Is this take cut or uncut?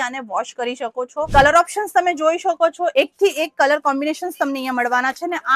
cut